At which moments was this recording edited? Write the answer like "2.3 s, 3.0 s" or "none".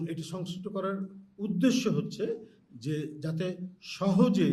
none